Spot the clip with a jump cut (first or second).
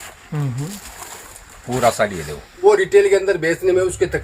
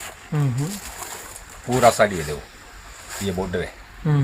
first